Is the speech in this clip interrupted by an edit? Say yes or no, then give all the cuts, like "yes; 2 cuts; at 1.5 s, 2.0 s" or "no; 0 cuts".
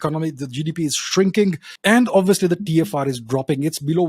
yes; 1 cut; at 1.7 s